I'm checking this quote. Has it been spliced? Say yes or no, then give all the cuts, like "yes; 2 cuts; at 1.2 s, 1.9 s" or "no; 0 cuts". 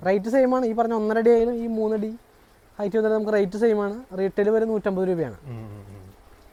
no; 0 cuts